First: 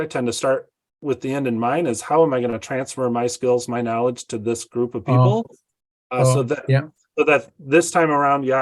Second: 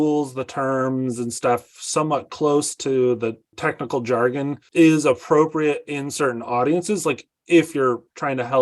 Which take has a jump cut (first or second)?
second